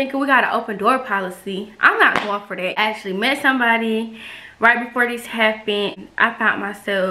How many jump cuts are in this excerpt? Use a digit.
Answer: 2